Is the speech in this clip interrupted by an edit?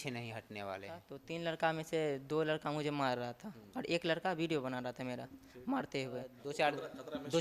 yes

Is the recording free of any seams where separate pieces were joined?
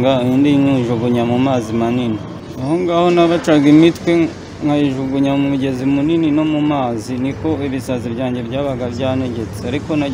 yes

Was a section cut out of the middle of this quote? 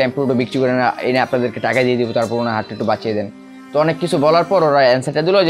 no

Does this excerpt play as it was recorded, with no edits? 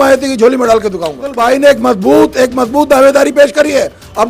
no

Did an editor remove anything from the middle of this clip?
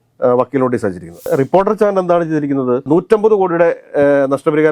yes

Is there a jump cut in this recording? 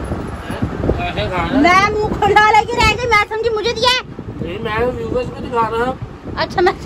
yes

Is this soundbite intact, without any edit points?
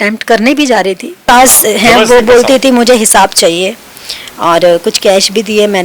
no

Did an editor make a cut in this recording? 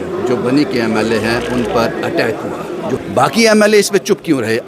yes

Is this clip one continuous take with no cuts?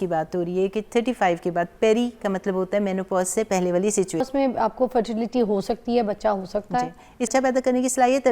no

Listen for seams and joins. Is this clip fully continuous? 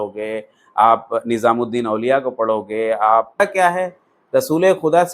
no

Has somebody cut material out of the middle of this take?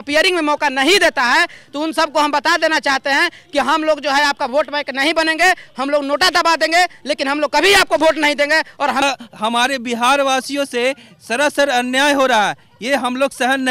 yes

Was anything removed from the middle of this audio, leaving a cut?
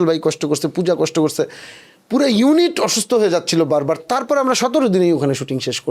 no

